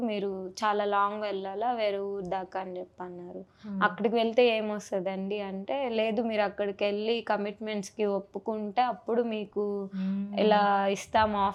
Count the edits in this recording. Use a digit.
0